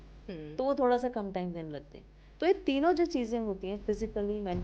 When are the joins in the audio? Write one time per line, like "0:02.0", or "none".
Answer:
none